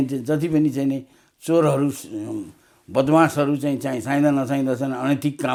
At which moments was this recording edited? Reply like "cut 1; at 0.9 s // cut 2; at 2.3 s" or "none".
none